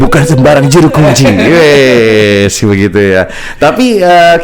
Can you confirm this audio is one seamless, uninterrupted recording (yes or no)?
yes